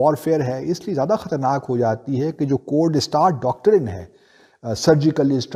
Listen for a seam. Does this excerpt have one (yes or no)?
no